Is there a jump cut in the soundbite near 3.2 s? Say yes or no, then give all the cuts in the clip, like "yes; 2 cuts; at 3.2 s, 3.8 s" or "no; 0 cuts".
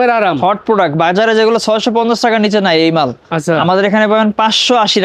no; 0 cuts